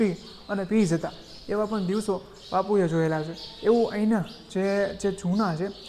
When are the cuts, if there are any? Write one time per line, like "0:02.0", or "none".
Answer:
none